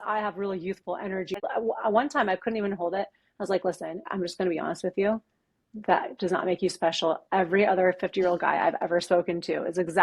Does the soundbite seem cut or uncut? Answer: cut